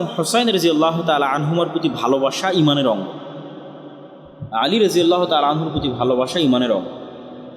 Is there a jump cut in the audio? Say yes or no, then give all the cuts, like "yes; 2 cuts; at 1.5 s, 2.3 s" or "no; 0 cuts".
no; 0 cuts